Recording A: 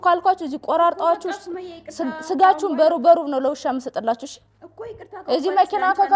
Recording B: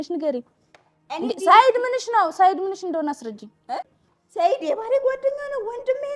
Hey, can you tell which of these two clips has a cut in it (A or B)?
B